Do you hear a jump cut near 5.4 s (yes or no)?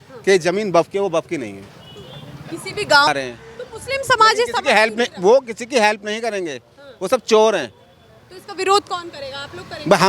no